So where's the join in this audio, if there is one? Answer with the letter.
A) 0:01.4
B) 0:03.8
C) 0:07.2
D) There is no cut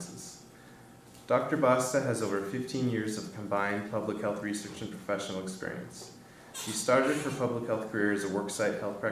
A